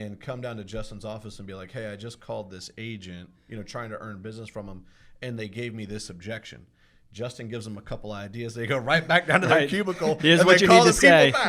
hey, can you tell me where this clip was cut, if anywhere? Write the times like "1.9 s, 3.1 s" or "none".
none